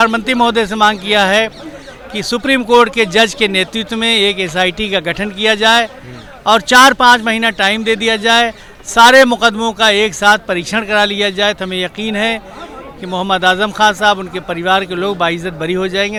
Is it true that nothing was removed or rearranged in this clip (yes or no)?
yes